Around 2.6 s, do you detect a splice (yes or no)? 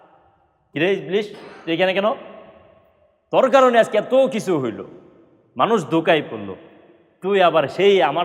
no